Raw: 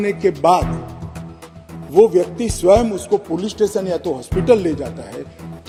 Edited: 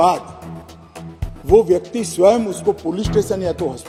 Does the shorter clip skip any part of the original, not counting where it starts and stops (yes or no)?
no